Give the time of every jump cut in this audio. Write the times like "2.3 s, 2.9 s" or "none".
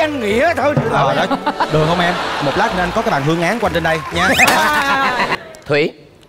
5.3 s